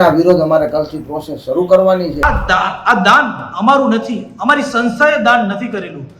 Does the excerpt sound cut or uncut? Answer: cut